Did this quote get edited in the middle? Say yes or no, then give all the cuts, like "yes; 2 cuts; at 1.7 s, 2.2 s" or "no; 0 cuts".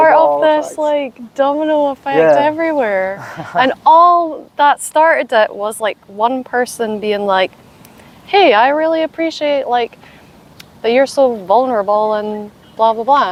no; 0 cuts